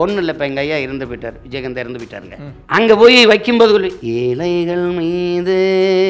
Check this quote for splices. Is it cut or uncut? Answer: cut